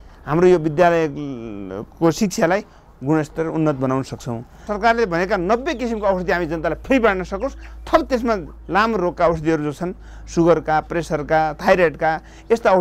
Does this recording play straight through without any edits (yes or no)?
no